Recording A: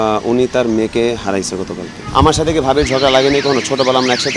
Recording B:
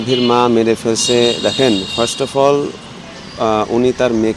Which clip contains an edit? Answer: A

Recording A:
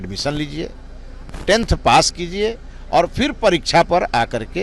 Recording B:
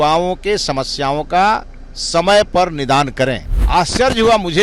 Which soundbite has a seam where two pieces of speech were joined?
B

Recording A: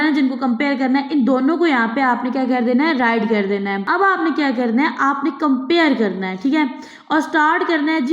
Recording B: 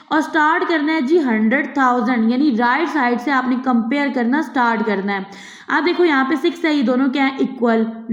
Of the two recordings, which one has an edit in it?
A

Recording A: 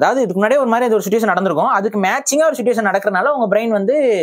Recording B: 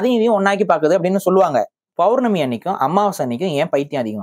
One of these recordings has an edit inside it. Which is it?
B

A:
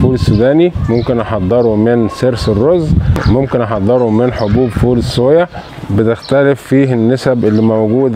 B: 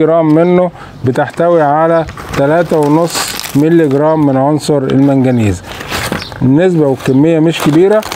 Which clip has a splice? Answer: A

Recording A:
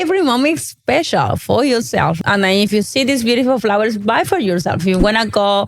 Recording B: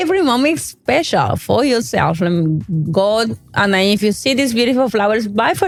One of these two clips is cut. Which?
A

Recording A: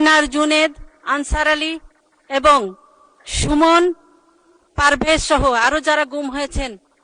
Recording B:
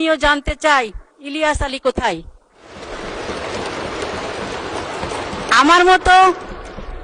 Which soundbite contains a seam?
B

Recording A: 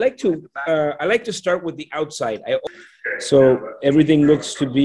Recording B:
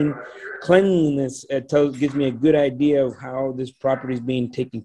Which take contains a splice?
A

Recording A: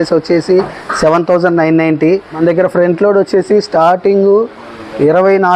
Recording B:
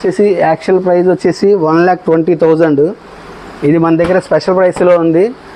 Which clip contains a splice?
A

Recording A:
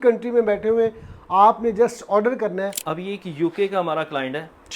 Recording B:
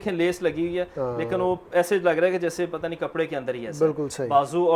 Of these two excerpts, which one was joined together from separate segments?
A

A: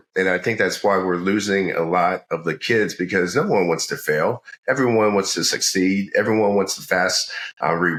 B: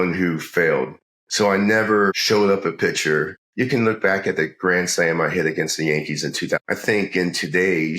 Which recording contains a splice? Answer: B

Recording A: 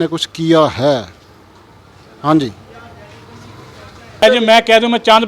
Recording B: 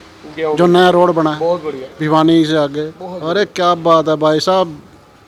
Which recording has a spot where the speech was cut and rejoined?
A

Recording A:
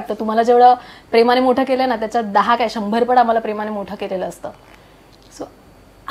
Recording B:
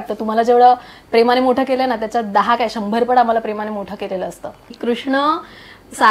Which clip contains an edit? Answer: B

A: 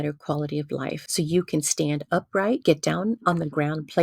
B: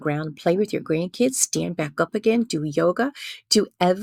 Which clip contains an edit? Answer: A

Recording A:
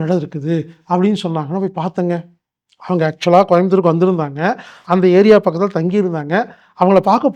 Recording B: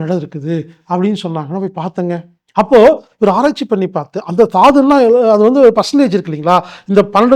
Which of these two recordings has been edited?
B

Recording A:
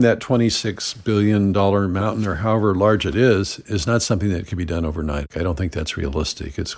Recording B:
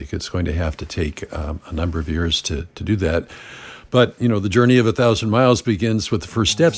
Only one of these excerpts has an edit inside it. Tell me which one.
A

